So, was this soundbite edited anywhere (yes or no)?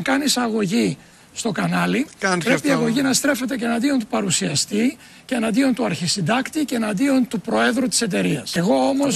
yes